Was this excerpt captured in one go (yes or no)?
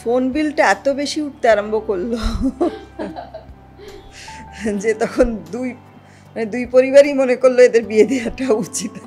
yes